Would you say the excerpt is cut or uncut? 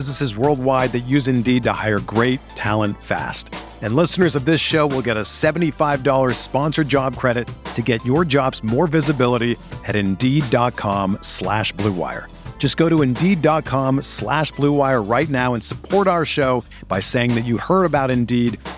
uncut